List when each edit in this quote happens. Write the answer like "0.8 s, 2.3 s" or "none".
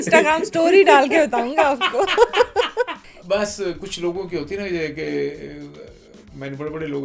3.1 s